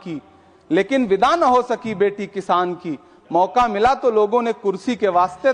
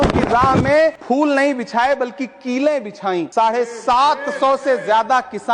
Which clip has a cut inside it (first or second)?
second